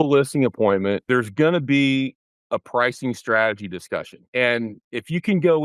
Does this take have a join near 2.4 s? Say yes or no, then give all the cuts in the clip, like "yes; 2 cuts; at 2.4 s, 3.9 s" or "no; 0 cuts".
no; 2 cuts; at 1.0 s, 4.3 s